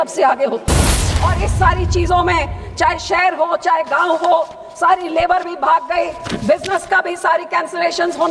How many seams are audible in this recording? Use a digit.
1